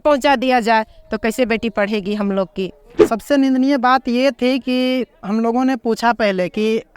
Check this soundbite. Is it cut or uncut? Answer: cut